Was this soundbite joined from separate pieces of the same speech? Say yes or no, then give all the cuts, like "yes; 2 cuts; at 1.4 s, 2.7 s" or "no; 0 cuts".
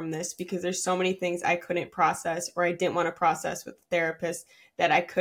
no; 0 cuts